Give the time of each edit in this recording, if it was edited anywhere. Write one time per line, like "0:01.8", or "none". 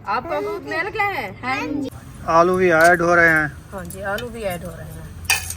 0:01.9